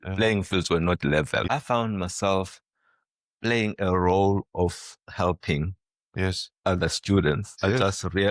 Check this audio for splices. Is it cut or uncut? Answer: cut